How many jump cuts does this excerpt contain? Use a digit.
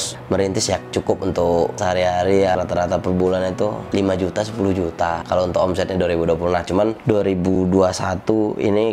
4